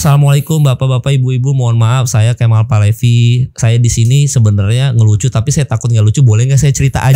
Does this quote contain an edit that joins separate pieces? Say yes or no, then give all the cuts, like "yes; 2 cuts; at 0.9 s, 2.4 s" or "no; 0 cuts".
no; 0 cuts